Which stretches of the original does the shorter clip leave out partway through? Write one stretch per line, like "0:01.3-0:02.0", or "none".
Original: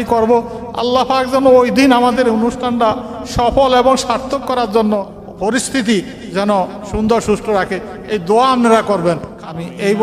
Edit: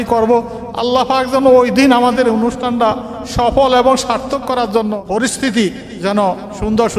0:05.0-0:05.3